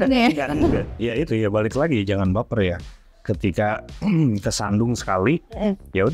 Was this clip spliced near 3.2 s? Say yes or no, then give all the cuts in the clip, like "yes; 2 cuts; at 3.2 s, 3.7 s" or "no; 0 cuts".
no; 1 cut; at 0.9 s